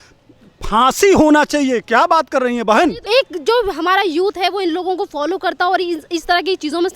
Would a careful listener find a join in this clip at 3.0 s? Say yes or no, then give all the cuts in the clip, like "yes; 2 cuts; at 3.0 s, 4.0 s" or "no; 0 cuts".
no; 0 cuts